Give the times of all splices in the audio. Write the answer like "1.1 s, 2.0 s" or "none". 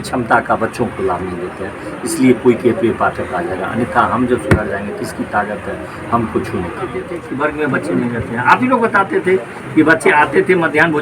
7.2 s